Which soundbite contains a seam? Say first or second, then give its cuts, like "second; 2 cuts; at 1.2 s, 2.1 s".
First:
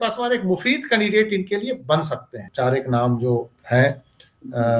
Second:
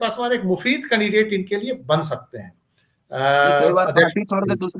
first; 1 cut; at 2.5 s